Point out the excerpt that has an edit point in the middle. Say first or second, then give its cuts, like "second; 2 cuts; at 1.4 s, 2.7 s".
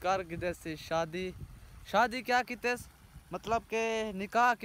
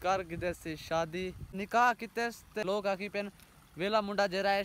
second; 2 cuts; at 1.6 s, 2.6 s